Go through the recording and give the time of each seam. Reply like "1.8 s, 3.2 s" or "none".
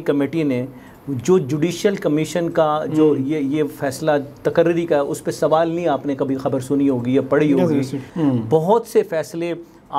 8.0 s